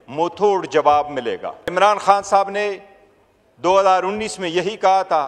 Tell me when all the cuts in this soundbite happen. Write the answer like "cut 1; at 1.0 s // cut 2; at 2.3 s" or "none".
cut 1; at 1.7 s

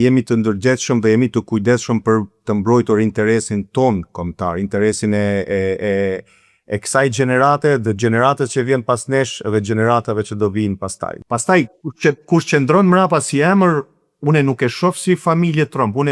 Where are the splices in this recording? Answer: cut 1; at 11.2 s

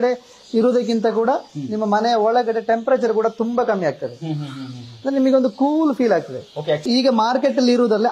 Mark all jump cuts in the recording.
cut 1; at 6.8 s

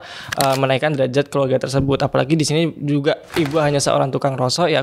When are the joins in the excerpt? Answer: none

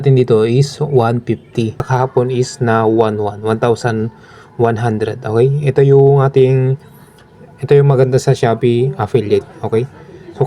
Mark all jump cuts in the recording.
cut 1; at 1.9 s

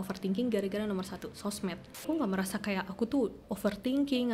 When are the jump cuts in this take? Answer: cut 1; at 2.0 s

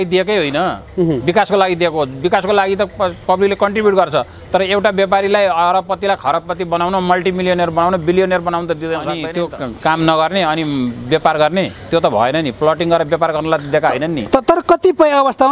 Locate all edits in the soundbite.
cut 1; at 9.2 s

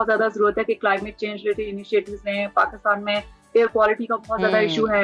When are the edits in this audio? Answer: none

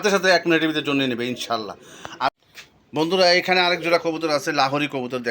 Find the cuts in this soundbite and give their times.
cut 1; at 2.3 s

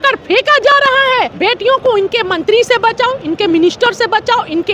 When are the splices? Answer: cut 1; at 1.3 s

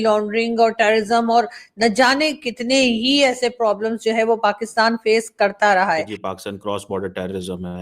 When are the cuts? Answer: cut 1; at 6.2 s

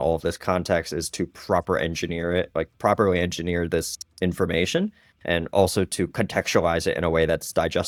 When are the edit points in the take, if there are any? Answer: none

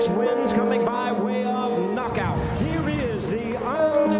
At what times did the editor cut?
none

